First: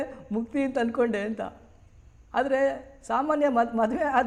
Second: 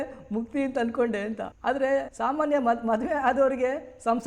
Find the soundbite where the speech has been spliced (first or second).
second